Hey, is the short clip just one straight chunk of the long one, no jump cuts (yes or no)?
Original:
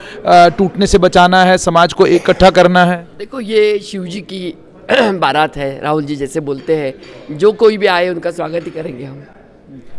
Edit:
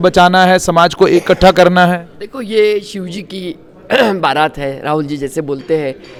yes